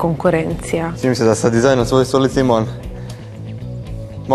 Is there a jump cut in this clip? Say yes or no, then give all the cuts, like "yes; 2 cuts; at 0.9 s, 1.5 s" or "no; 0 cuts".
yes; 1 cut; at 0.9 s